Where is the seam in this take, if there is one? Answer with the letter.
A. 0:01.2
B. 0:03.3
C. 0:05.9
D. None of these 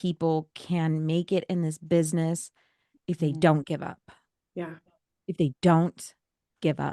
D